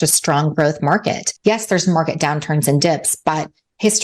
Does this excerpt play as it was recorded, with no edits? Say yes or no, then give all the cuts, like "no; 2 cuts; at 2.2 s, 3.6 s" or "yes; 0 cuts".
no; 1 cut; at 1.3 s